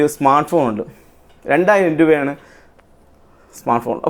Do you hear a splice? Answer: no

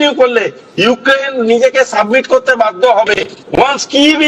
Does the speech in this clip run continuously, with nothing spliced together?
no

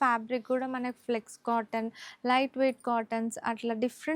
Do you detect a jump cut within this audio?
no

